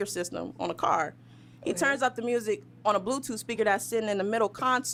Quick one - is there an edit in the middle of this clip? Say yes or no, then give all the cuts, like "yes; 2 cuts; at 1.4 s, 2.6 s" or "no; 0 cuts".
no; 0 cuts